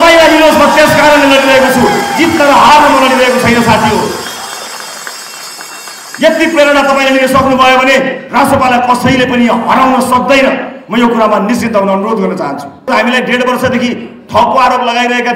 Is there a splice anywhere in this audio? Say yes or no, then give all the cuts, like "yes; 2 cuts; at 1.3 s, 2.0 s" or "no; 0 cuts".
yes; 1 cut; at 12.9 s